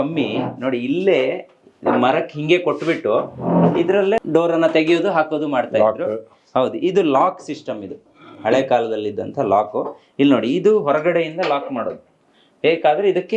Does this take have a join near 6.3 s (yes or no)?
no